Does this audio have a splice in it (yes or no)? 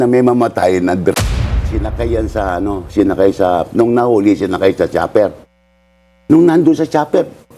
yes